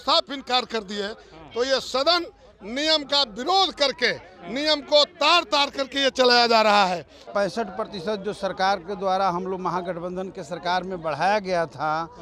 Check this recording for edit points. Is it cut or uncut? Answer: cut